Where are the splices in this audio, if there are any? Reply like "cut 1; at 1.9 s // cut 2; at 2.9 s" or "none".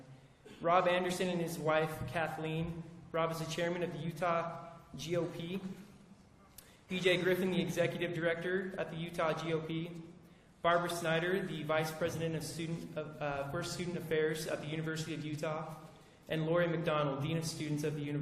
cut 1; at 12.2 s